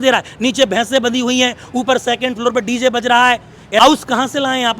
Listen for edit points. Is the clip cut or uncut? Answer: cut